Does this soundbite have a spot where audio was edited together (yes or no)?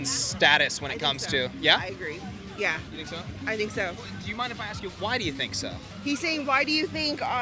no